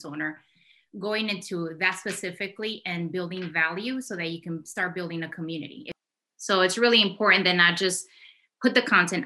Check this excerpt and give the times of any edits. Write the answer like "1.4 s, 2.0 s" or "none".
5.9 s